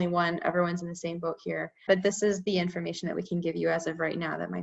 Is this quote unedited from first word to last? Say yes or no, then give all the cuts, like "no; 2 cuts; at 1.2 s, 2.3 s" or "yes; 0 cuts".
no; 1 cut; at 1.8 s